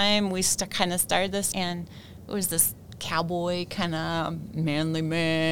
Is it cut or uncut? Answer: cut